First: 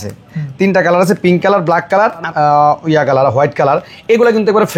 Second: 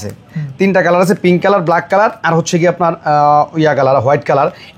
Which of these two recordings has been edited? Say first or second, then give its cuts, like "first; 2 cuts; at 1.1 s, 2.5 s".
first; 1 cut; at 2.2 s